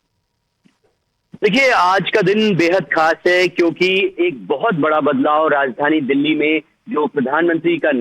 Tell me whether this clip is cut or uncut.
uncut